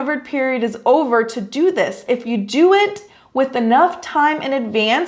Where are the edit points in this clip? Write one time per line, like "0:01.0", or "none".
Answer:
0:02.0

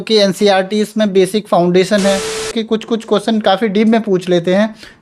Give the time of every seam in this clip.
0:02.5

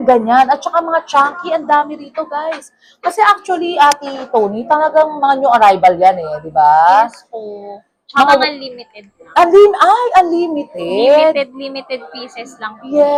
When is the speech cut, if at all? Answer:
none

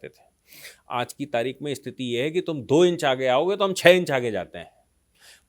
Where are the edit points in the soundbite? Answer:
none

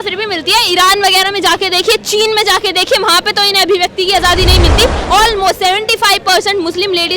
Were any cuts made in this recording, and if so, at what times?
0:05.0

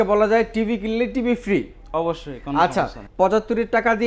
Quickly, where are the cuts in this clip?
0:03.0

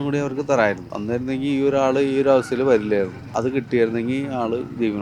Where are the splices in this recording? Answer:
0:00.9
0:03.2

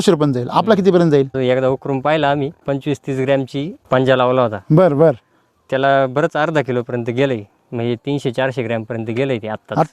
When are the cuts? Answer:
0:01.4
0:02.6
0:03.8

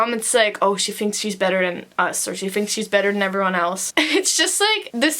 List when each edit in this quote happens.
0:03.8

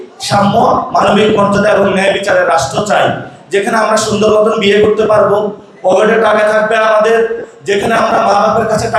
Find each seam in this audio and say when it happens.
none

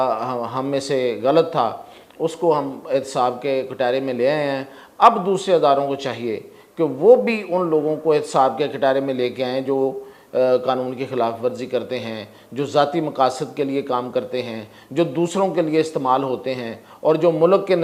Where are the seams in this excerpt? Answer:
none

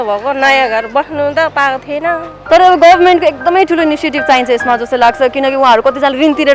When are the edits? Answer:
0:02.3

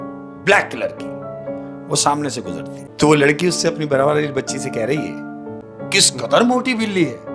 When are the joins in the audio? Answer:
0:02.8
0:05.6

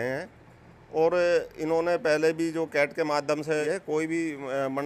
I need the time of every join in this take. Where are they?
0:03.6

